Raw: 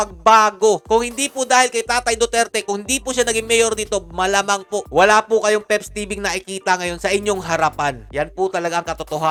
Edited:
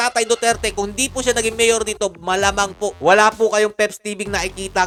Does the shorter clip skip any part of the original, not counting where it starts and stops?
no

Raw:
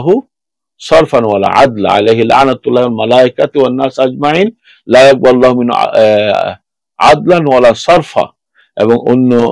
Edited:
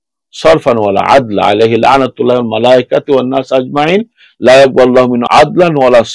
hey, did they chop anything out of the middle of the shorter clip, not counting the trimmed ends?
yes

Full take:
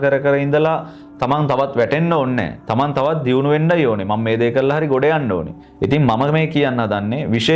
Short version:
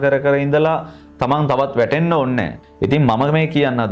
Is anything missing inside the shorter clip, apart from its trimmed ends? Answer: yes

